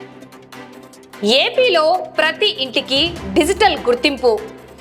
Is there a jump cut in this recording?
yes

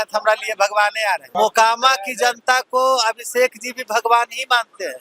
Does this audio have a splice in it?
yes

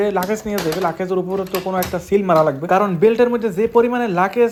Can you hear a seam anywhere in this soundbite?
no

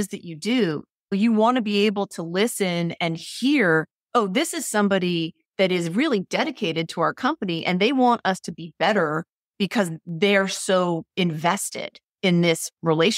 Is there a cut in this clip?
yes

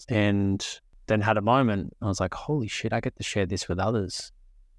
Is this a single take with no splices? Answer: yes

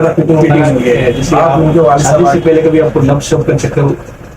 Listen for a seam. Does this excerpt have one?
yes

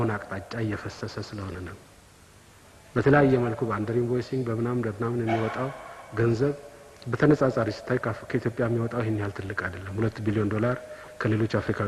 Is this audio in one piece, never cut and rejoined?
yes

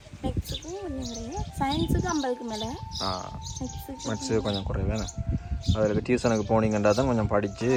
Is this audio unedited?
yes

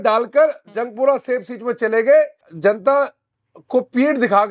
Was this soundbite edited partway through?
yes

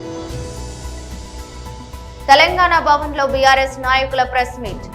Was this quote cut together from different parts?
yes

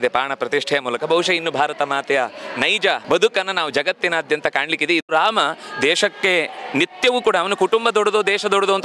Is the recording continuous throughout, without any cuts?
no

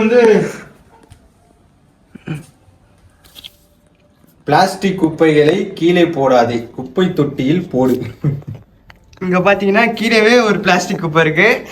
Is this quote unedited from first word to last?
yes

